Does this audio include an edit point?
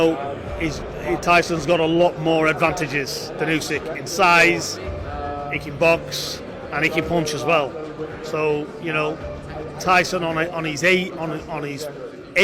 no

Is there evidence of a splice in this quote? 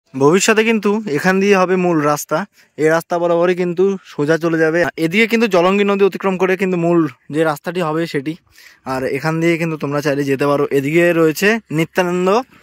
no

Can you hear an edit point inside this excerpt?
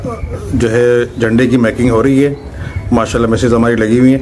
no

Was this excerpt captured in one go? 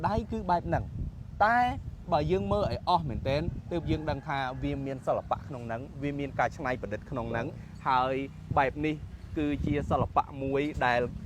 yes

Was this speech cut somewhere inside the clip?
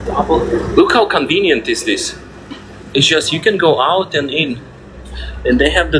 no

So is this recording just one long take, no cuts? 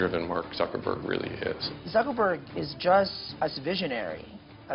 no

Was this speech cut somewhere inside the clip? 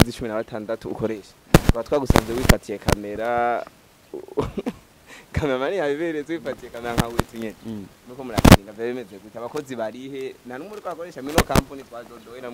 no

